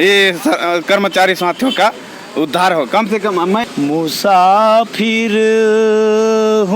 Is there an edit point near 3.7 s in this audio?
yes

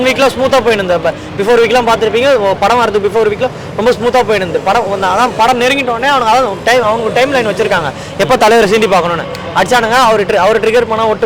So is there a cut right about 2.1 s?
no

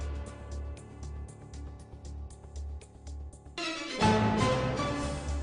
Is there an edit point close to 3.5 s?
yes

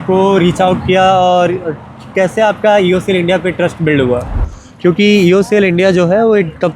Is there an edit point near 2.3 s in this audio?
no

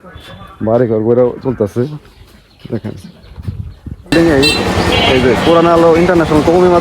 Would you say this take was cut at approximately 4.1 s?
yes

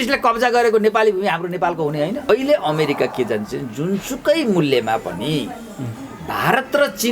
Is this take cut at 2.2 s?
yes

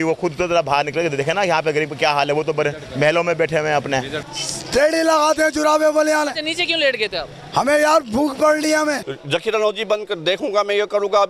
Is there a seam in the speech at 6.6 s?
no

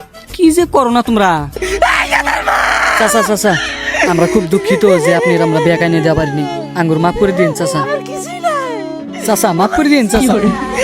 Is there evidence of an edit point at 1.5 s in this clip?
yes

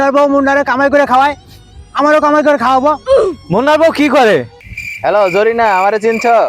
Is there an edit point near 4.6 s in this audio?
yes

